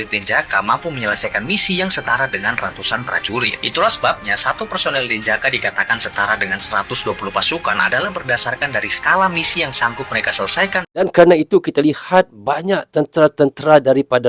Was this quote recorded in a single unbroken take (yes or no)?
no